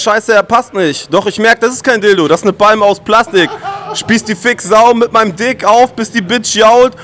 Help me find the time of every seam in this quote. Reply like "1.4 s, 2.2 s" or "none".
none